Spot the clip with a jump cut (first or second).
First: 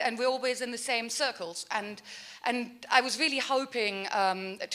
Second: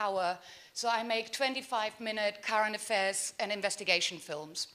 first